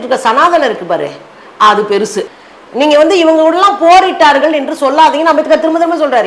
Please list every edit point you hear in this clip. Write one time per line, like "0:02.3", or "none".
0:02.2